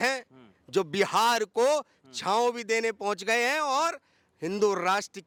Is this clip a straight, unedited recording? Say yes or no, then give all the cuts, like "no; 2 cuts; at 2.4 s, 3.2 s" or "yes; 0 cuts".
yes; 0 cuts